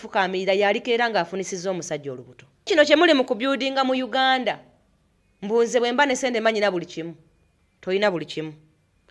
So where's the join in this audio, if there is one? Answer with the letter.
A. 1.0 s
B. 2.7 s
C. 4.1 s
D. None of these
B